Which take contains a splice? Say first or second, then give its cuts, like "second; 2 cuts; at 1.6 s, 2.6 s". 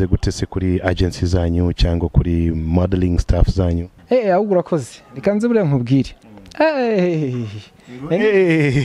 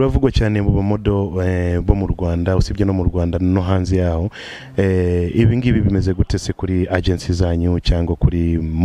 first; 1 cut; at 3.9 s